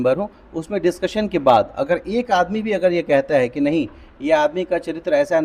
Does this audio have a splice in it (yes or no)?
no